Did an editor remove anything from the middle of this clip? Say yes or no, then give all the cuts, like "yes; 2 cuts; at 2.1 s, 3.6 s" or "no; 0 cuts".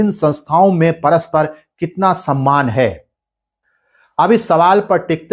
no; 0 cuts